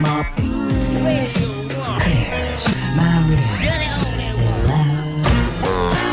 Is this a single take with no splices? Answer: yes; 0 cuts

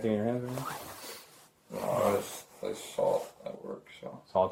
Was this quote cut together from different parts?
no; 0 cuts

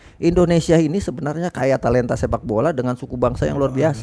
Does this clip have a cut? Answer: no; 0 cuts

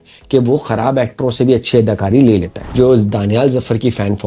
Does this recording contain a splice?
yes; 1 cut; at 2.6 s

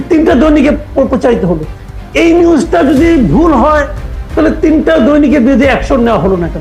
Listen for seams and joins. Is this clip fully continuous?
yes; 0 cuts

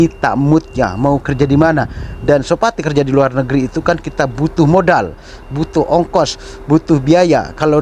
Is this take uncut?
yes; 0 cuts

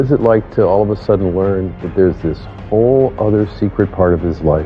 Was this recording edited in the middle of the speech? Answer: no; 0 cuts

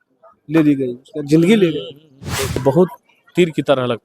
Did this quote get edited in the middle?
yes; 1 cut; at 2.6 s

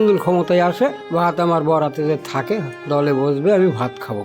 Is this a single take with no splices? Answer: no; 2 cuts; at 1.0 s, 2.7 s

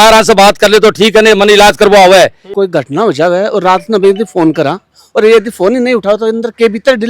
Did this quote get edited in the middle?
yes; 1 cut; at 2.4 s

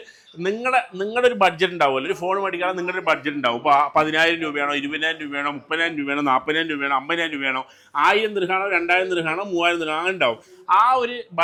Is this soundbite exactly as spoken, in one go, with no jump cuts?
yes; 0 cuts

